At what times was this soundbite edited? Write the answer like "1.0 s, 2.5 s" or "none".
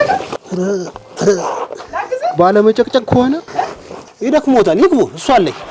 none